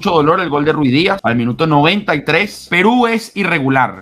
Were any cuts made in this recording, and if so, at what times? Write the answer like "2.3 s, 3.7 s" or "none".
1.2 s, 2.6 s